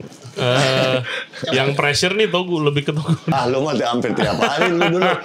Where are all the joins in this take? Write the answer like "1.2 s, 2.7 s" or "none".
3.3 s